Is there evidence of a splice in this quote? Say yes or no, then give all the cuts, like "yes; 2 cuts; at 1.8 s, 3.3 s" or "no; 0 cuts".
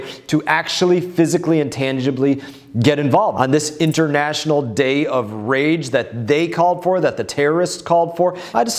yes; 1 cut; at 3.3 s